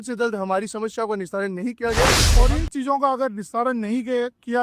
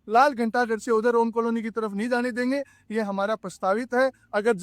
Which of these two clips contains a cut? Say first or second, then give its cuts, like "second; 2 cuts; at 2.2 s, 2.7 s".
first; 1 cut; at 2.2 s